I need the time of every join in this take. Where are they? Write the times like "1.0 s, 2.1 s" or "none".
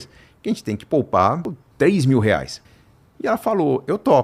2.9 s